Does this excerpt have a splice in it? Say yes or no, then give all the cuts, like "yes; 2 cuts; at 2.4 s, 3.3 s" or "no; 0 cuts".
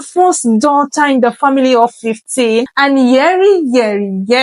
yes; 1 cut; at 2.7 s